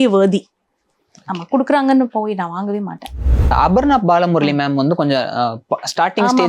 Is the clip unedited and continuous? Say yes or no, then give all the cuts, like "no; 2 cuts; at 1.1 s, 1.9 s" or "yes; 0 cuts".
no; 1 cut; at 3.4 s